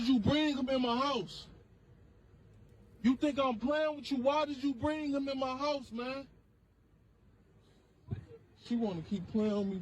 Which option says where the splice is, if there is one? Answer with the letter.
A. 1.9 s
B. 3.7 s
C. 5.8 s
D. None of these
B